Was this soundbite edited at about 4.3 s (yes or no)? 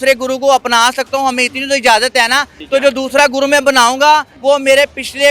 yes